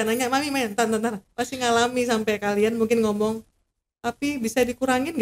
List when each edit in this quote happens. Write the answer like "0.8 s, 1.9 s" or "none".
1.3 s